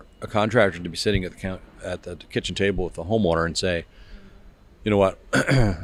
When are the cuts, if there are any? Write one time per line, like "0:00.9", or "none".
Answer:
none